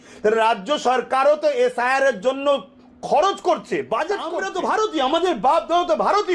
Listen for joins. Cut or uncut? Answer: cut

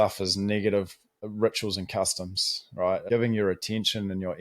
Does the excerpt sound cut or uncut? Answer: cut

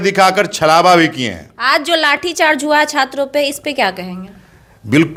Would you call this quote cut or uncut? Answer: uncut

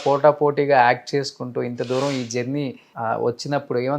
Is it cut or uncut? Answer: cut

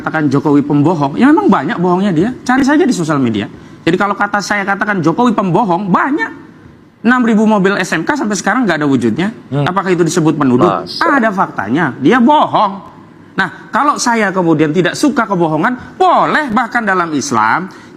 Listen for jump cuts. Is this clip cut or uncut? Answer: uncut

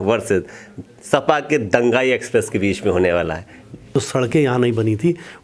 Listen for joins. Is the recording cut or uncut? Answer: cut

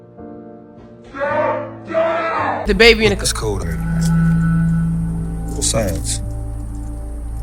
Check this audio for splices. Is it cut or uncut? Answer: cut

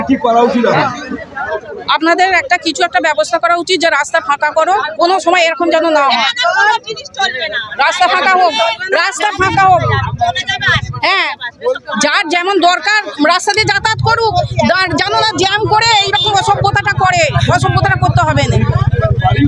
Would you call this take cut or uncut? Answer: uncut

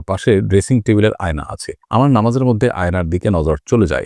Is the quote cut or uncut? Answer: uncut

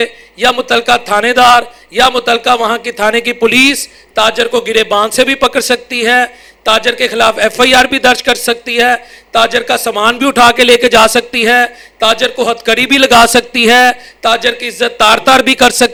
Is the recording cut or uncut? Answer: uncut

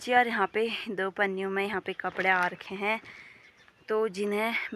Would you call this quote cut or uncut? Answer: uncut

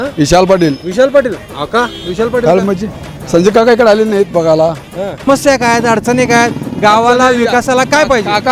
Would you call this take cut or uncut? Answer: uncut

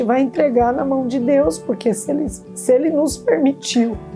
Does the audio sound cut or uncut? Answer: uncut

